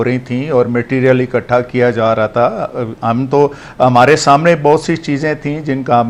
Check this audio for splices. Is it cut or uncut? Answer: uncut